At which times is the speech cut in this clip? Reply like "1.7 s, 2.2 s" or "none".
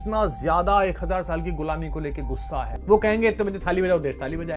2.8 s